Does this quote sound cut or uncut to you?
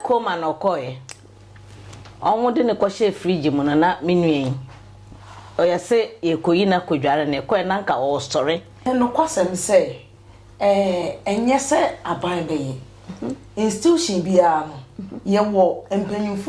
cut